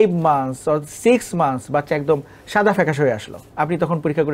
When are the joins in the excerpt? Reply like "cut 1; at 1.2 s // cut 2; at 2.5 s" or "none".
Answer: cut 1; at 3.4 s